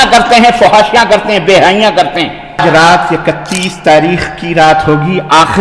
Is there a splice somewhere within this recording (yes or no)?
yes